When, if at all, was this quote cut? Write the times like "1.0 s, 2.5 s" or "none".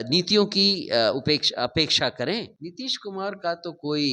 2.5 s